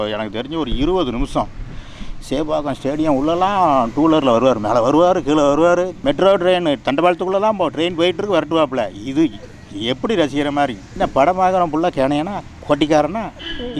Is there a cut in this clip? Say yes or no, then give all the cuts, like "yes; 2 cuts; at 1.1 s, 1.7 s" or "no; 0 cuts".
no; 0 cuts